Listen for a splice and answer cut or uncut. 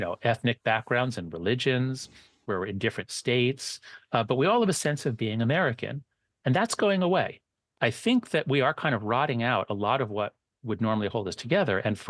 cut